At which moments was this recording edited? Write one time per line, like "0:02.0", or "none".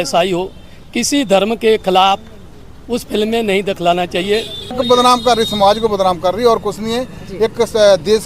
0:04.8